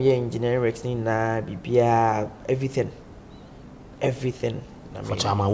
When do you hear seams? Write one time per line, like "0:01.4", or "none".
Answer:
none